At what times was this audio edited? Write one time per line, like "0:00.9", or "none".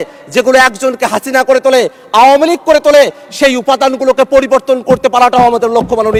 none